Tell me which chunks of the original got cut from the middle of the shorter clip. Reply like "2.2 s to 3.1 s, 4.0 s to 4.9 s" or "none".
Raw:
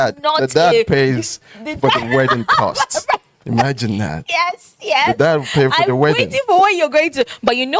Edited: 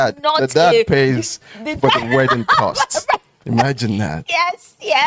none

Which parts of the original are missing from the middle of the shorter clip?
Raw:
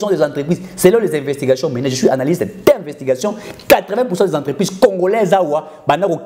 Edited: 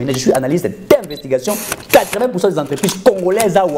none

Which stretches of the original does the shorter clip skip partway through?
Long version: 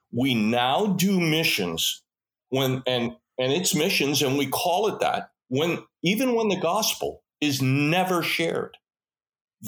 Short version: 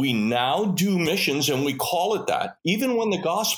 1.3 s to 3.8 s, 5.3 s to 5.9 s

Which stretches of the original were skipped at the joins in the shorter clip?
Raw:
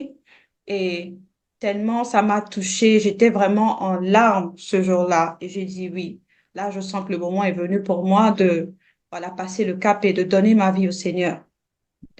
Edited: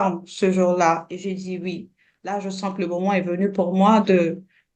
none

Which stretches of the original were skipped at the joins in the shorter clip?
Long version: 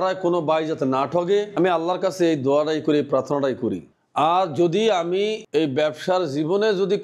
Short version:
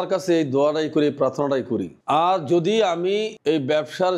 3.9 s to 4.0 s

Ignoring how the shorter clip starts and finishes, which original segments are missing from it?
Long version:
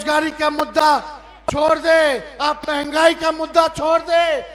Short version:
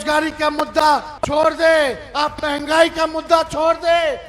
1.1 s to 1.4 s

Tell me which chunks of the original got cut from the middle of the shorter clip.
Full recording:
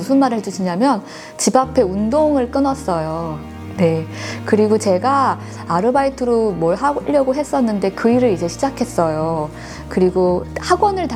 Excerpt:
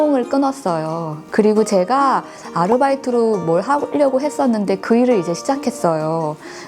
3.4 s to 4.3 s

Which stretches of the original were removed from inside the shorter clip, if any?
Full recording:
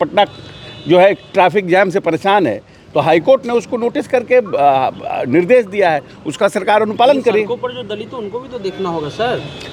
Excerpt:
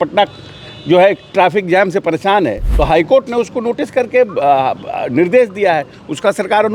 2.6 s to 2.8 s

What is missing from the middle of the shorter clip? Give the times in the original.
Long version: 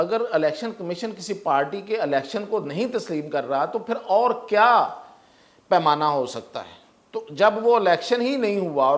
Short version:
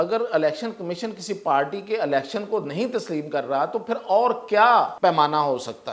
4.9 s to 5.6 s

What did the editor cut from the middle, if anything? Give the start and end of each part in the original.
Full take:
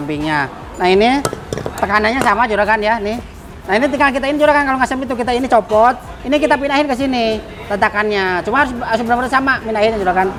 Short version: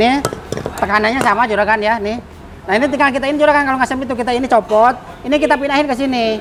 none

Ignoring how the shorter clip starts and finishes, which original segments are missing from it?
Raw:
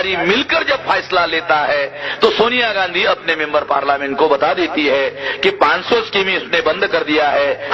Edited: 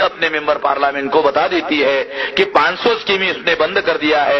none

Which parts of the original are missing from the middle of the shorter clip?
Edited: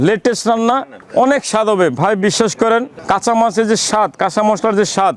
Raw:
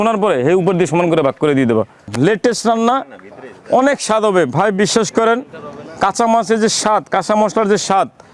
3.1 s to 3.5 s, 5.5 s to 5.9 s

